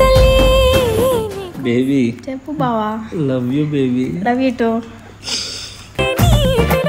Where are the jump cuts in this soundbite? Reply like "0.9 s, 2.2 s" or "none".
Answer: 1.5 s